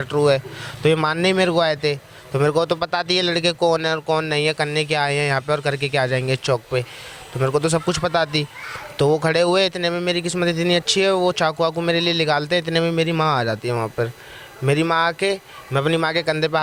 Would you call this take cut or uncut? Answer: uncut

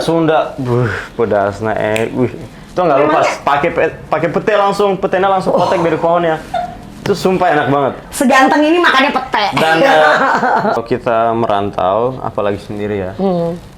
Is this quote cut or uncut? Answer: cut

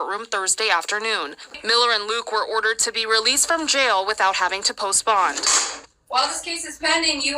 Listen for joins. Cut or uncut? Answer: cut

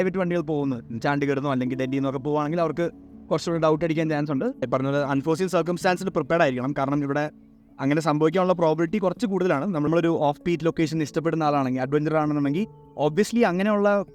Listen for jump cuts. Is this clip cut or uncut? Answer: cut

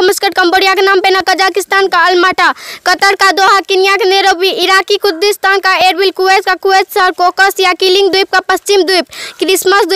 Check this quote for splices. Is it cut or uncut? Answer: uncut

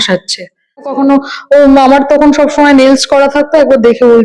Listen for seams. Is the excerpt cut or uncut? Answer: cut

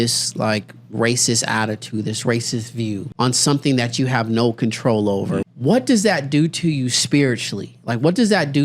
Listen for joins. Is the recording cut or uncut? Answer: cut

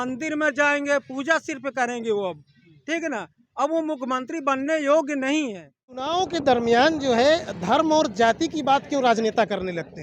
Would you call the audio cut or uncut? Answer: cut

